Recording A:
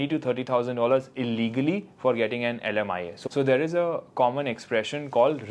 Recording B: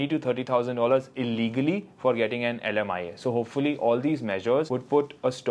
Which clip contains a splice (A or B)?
A